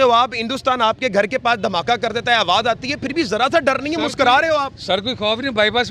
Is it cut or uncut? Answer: uncut